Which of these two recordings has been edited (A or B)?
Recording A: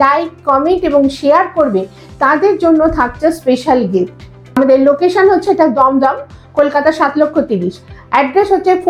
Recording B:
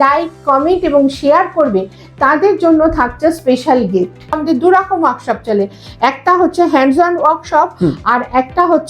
B